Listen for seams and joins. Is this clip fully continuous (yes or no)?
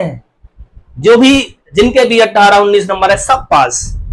yes